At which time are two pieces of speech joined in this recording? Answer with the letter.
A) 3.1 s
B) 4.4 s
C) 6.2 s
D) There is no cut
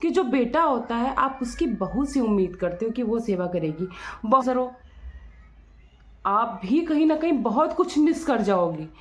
B